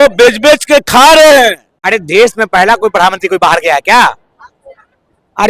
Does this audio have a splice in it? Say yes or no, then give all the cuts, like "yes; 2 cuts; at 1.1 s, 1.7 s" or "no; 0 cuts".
yes; 1 cut; at 1.7 s